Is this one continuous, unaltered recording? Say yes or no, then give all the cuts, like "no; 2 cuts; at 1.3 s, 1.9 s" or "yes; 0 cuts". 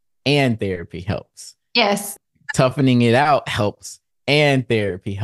no; 1 cut; at 2.1 s